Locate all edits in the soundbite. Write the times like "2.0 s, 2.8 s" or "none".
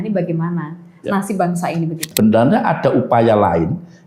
2.1 s